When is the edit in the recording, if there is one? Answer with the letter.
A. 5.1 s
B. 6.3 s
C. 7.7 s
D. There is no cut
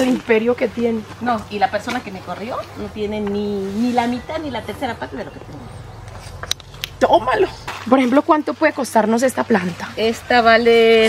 C